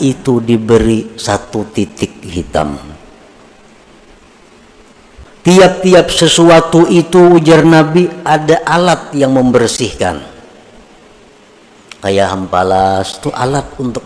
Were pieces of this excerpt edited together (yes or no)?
yes